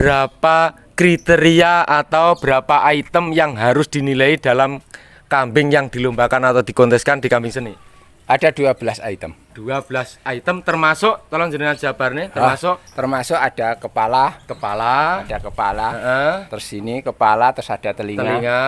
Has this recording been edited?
no; 0 cuts

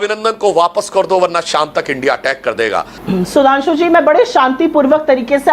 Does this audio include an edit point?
yes; 1 cut; at 2.9 s

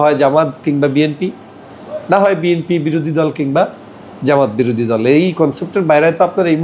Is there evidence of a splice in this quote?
no; 0 cuts

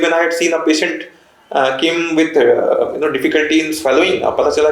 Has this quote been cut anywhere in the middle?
no; 0 cuts

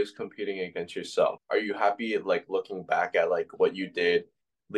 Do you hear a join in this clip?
yes; 1 cut; at 1.4 s

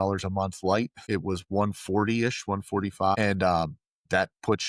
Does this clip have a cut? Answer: yes; 2 cuts; at 1.0 s, 3.1 s

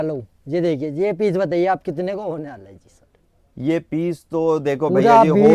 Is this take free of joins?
yes; 0 cuts

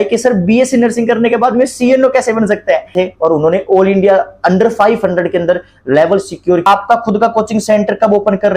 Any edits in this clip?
yes; 2 cuts; at 2.9 s, 6.7 s

